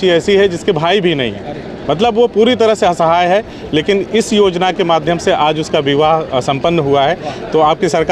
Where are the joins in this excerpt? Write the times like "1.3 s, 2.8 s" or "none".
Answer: none